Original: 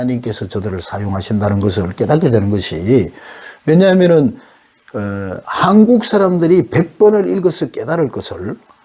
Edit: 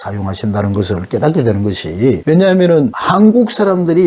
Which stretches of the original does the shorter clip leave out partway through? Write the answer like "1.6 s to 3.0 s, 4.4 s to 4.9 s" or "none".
3.1 s to 3.6 s, 4.4 s to 5.5 s